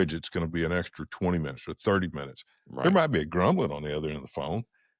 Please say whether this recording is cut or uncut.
uncut